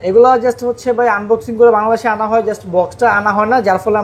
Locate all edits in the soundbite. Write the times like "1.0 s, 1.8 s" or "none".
none